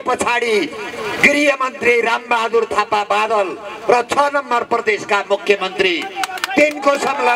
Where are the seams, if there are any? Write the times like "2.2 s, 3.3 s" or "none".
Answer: none

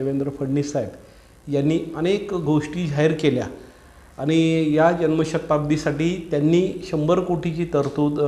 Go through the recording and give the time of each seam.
none

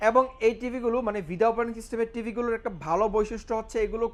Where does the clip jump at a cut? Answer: none

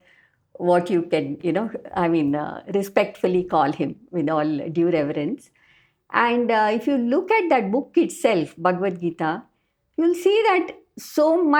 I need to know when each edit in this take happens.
none

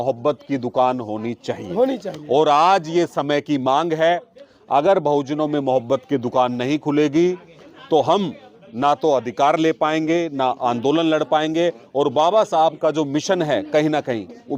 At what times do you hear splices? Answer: none

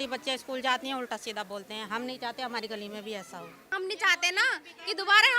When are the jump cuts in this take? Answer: 3.7 s

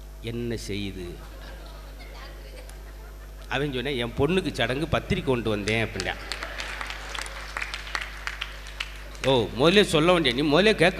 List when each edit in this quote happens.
9.1 s

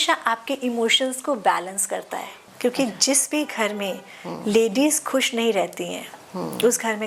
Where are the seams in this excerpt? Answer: 2.5 s

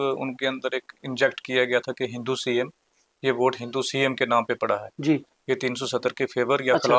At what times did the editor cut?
none

